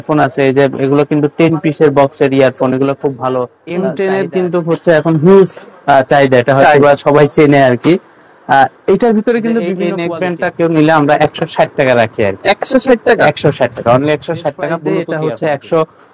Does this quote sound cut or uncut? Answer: cut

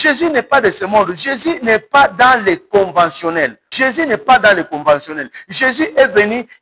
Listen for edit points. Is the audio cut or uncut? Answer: cut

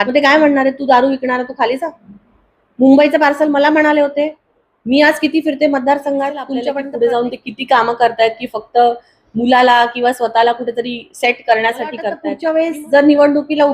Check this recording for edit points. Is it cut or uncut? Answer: cut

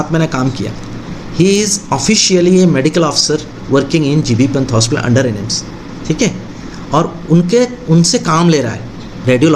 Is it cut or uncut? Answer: uncut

